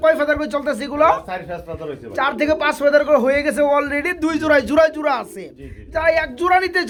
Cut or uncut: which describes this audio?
uncut